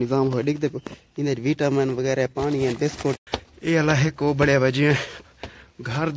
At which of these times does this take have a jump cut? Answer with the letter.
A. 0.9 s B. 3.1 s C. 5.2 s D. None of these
B